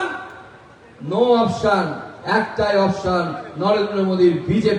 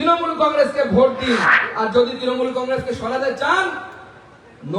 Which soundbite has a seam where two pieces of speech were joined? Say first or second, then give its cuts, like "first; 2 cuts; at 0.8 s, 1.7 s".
second; 1 cut; at 1.6 s